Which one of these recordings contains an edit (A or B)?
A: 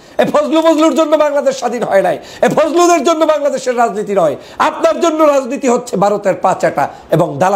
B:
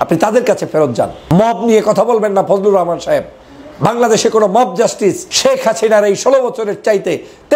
B